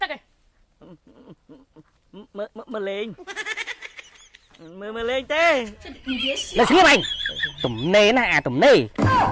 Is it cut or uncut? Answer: cut